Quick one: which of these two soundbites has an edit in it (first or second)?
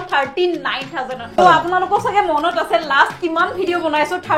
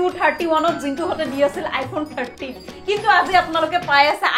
first